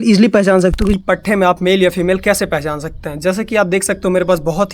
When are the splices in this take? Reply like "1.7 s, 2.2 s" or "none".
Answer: 1.0 s